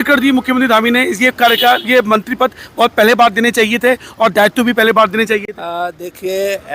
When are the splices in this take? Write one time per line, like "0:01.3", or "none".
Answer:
none

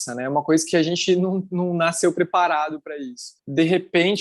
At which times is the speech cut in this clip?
0:03.3

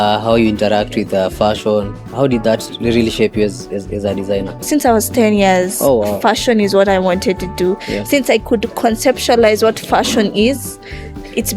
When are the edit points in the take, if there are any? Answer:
0:04.6

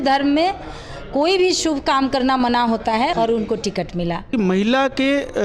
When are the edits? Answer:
0:03.1
0:04.3

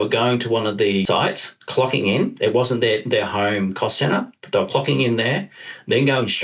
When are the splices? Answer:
0:01.0

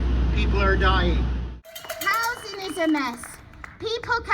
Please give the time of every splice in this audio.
0:01.8

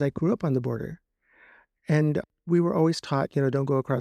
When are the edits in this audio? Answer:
0:02.2

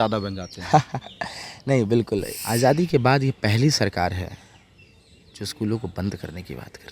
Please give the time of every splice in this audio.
0:02.4

